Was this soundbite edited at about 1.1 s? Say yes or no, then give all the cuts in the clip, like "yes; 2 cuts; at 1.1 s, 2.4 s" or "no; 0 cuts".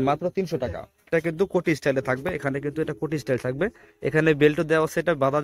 yes; 1 cut; at 1.1 s